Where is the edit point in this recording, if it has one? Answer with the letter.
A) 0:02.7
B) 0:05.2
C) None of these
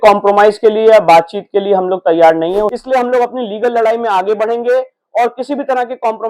A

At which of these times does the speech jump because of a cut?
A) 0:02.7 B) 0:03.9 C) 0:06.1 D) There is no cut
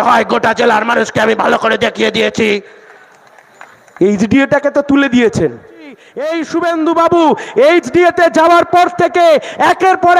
C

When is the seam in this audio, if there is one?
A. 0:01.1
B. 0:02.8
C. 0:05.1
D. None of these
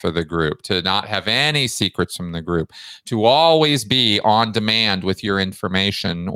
D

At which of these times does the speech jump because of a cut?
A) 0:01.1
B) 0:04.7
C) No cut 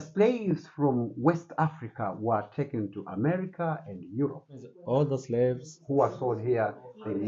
B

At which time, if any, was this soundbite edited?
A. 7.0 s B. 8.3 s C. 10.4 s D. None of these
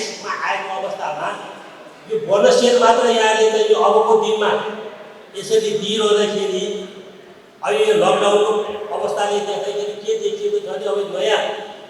D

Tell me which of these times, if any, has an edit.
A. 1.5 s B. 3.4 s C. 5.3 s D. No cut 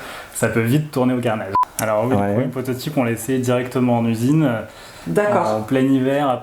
A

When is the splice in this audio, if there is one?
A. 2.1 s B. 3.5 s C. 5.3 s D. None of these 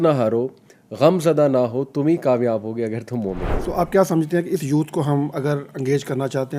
B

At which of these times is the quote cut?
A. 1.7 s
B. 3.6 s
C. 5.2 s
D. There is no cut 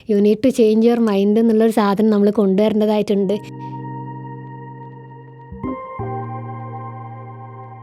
B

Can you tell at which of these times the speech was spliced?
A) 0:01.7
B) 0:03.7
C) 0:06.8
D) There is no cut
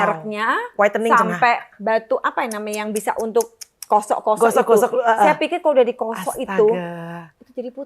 A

